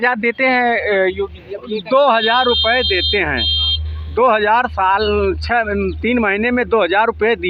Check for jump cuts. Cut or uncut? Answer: uncut